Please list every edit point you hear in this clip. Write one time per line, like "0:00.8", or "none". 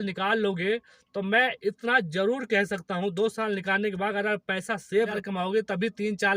0:05.2